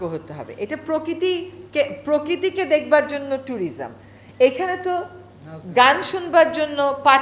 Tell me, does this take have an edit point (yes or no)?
no